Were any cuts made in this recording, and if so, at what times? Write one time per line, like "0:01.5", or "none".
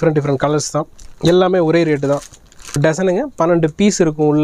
0:02.8